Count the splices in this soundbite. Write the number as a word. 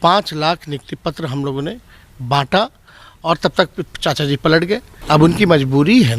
one